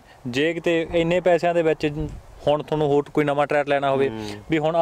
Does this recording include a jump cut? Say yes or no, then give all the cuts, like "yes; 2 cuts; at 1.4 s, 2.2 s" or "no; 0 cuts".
no; 0 cuts